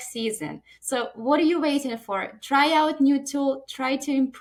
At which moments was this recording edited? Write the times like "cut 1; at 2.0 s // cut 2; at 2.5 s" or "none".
none